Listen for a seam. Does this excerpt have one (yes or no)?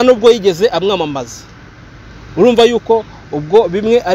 no